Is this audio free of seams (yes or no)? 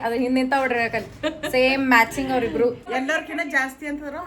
no